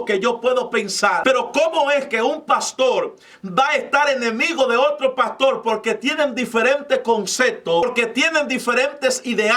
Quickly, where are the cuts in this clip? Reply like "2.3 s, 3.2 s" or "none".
1.2 s, 7.8 s

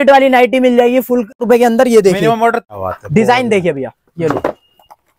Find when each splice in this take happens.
1.4 s, 2.7 s

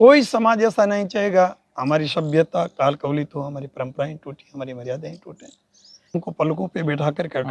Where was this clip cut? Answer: 6.1 s

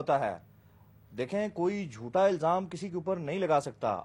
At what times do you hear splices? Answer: none

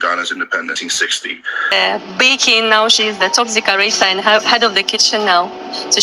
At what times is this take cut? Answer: 1.7 s

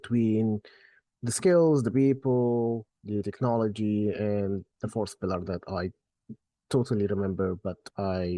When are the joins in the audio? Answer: none

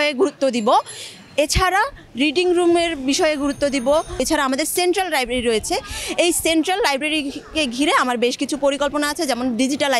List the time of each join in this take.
none

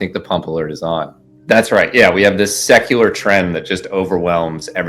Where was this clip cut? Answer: 1.2 s

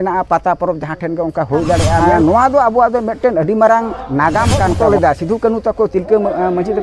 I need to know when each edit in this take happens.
2.0 s, 4.8 s

